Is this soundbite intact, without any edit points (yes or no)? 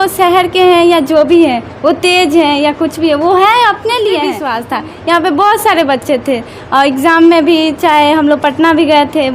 no